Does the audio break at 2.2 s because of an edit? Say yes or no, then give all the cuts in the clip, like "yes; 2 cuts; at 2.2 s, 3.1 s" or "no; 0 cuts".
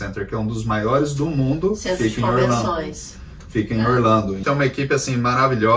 no; 1 cut; at 4.4 s